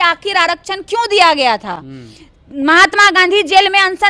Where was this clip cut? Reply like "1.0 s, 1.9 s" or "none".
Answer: none